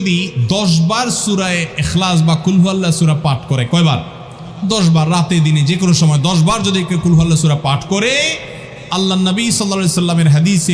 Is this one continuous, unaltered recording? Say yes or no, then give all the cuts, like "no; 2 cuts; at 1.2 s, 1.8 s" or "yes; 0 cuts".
yes; 0 cuts